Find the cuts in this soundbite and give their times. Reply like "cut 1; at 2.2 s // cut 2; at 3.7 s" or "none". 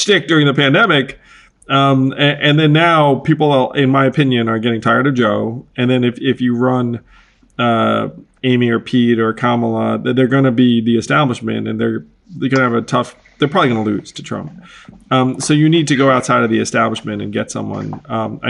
none